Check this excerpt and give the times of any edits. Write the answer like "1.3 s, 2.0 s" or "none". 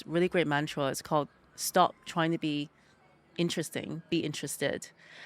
none